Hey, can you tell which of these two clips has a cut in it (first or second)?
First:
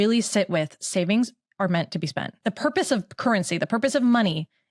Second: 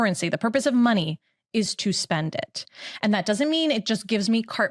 first